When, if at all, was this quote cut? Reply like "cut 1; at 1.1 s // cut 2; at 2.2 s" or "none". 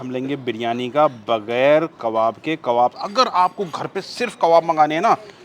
cut 1; at 3.0 s